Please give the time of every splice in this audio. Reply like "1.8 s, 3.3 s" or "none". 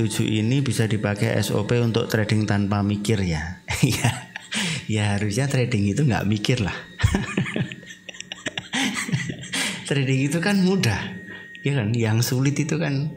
none

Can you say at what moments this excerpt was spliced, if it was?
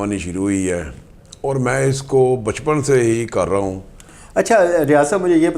none

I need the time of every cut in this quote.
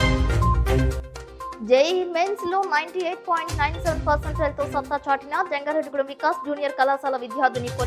1.5 s

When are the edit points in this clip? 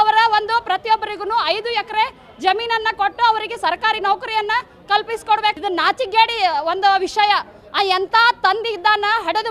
none

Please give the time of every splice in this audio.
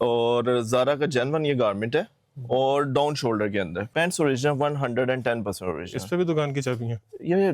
3.9 s

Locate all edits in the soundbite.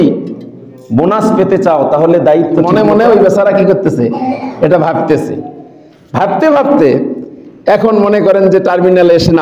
2.7 s

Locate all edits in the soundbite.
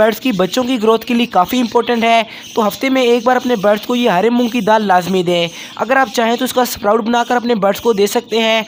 none

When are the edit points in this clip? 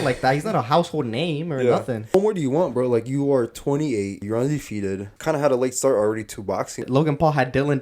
2.1 s, 4.2 s, 5.1 s, 6.8 s

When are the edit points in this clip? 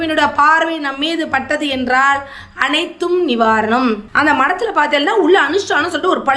4.1 s

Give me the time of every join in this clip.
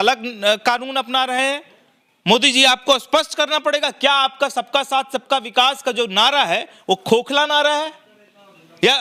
none

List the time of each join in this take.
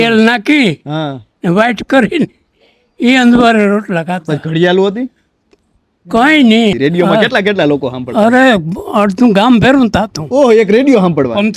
6.8 s

